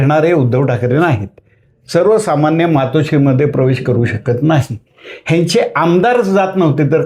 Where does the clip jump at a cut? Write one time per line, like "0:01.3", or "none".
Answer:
none